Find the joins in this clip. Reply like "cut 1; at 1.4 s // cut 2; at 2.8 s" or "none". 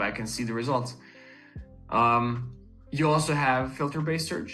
none